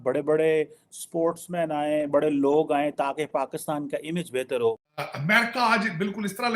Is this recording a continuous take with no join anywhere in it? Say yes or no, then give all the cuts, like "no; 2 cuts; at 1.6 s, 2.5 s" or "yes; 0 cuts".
no; 1 cut; at 5.1 s